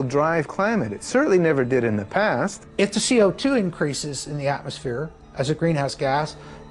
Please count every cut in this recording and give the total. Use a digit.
1